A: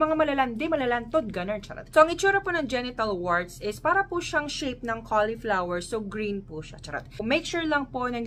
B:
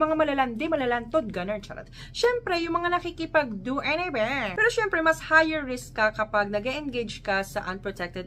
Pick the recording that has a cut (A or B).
A